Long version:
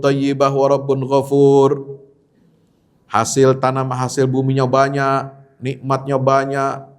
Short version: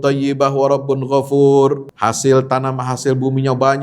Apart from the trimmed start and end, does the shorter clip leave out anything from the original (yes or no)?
yes